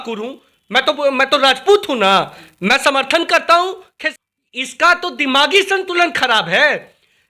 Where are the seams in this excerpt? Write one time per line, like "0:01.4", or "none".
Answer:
0:04.0